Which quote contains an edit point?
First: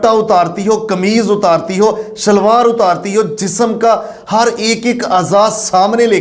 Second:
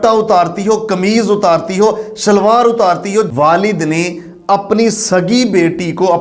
second; 1 cut; at 3.3 s

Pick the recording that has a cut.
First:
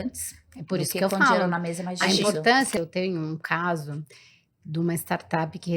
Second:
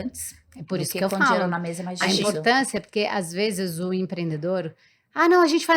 first; 1 cut; at 2.8 s

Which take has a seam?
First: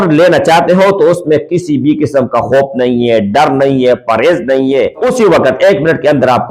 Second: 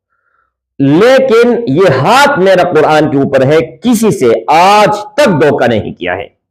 first; 1 cut; at 5.0 s

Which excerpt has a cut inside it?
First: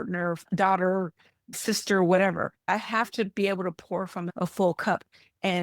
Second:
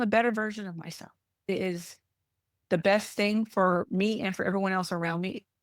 second; 1 cut; at 1.5 s

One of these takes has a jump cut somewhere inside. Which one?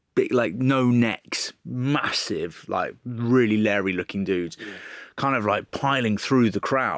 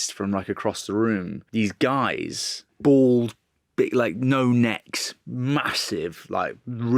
second; 2 cuts; at 1.4 s, 2.6 s

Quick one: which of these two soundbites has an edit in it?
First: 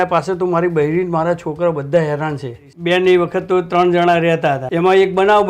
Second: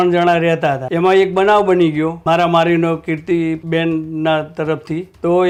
first; 1 cut; at 2.7 s

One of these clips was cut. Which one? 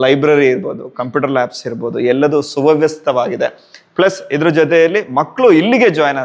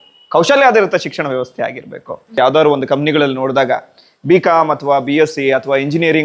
second; 1 cut; at 2.4 s

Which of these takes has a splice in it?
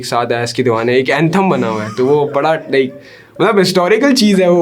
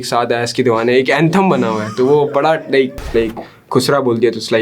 second; 1 cut; at 3.1 s

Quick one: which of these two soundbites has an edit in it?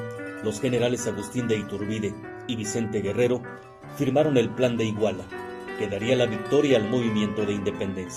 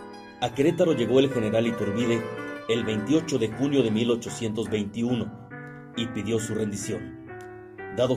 second; 1 cut; at 4.7 s

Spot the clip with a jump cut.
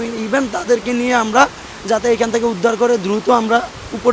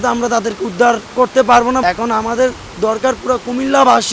second; 1 cut; at 1.8 s

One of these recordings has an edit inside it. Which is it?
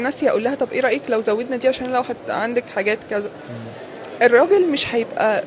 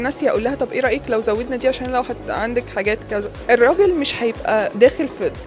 second; 2 cuts; at 3.4 s, 4.7 s

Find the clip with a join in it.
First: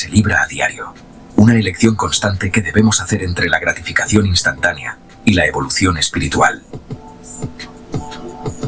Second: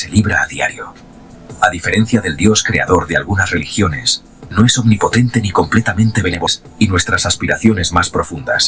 second; 2 cuts; at 1.2 s, 6.5 s

